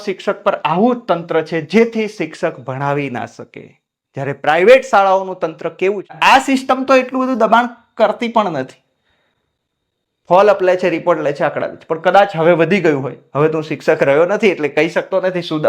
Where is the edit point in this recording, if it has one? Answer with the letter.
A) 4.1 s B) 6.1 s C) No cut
B